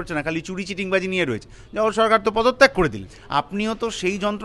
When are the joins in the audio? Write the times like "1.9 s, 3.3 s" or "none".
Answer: 3.1 s